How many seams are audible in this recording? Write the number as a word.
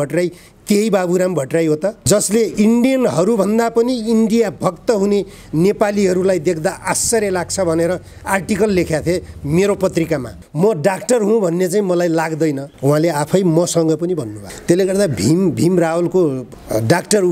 one